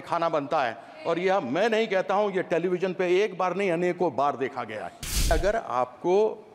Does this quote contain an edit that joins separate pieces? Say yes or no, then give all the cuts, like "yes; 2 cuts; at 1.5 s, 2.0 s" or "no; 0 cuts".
yes; 1 cut; at 5.3 s